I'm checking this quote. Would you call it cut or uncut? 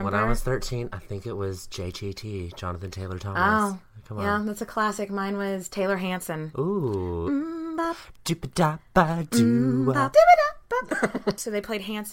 cut